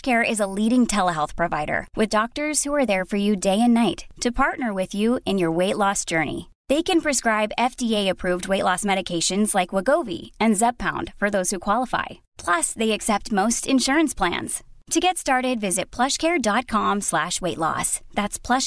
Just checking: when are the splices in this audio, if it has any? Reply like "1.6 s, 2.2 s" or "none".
none